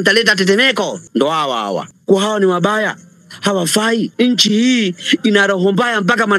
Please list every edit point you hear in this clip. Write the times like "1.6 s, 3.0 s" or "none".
1.0 s, 1.9 s, 4.1 s